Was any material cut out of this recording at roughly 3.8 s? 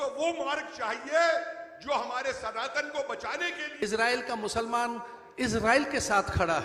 yes; 1 cut; at 3.8 s

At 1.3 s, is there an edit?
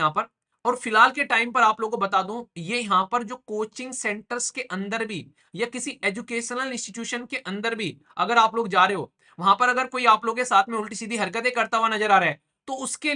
no; 0 cuts

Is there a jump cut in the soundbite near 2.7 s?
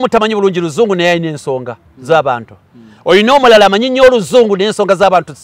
no; 0 cuts

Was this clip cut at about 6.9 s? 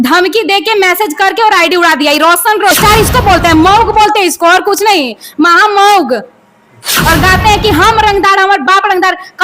yes; 2 cuts; at 2.7 s, 6.9 s

